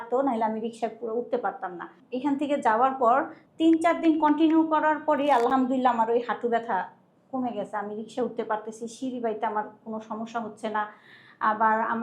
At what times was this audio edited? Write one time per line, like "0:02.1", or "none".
0:02.0
0:03.4